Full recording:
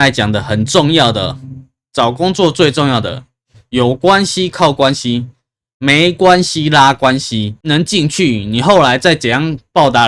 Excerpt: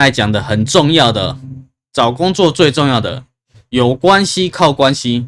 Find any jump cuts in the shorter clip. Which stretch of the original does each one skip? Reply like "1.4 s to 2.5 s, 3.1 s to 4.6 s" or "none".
none